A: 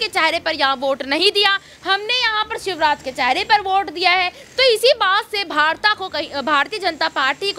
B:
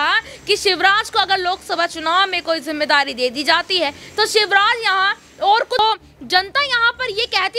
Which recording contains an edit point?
B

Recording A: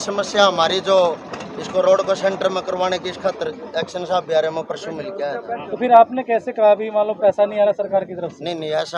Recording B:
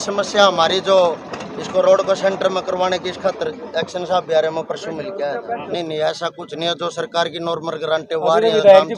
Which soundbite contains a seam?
B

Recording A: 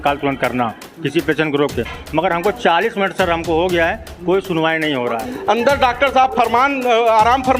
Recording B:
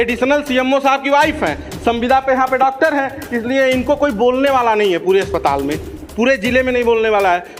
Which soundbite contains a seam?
A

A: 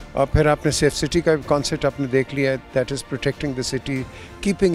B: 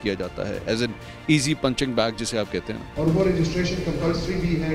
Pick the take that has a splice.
B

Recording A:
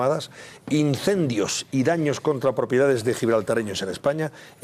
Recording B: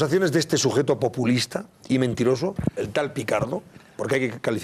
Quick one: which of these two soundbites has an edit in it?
B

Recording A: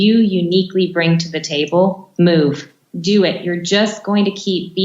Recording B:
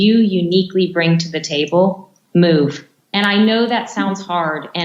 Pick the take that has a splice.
A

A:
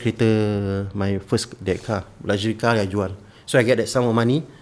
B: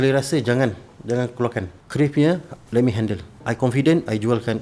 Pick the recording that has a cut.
B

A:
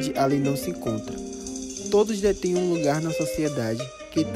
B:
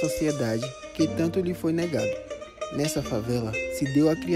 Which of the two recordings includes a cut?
B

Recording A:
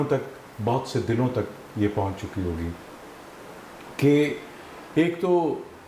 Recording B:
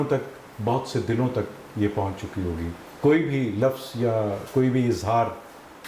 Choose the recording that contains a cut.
B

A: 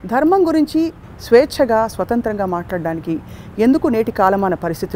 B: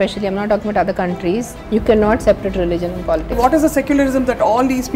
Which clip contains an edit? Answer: B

